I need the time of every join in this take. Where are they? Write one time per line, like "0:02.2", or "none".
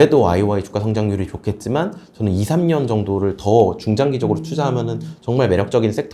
none